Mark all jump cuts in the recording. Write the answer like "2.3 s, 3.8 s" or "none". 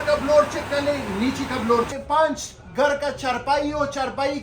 1.9 s